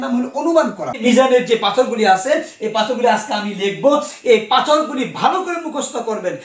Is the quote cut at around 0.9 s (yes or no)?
yes